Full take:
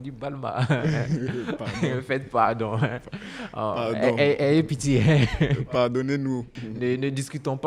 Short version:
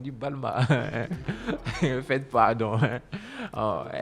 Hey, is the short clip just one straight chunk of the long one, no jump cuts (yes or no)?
yes